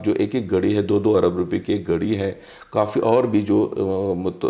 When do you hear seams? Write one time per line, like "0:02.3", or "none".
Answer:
none

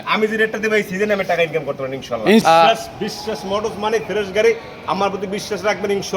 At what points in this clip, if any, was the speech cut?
0:02.4

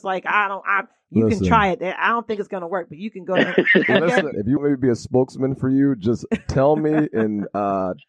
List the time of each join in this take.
0:04.6

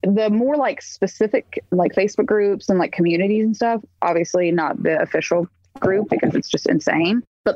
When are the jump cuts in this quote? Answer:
none

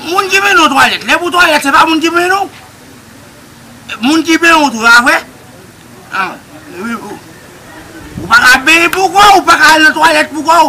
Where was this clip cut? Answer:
0:07.9

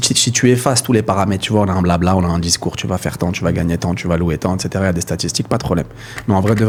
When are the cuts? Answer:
none

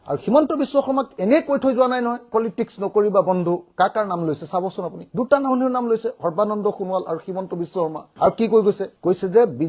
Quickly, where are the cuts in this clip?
none

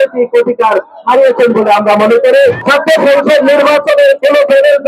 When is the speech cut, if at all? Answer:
0:02.6

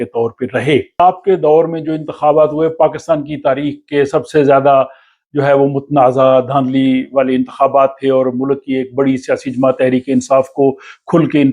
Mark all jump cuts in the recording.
0:01.0

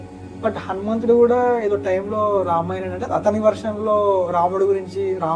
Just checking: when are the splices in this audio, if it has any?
none

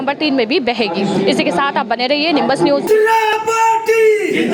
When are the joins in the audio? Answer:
none

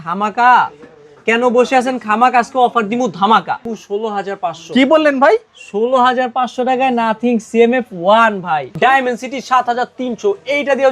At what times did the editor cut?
0:03.6
0:08.7

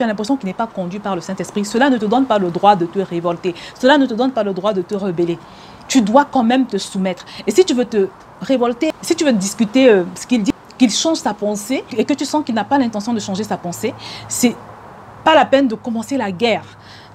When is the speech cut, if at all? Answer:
0:10.5

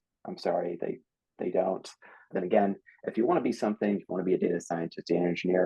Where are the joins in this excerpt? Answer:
0:02.3

